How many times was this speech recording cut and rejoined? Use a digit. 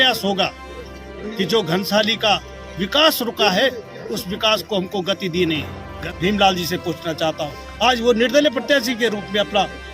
1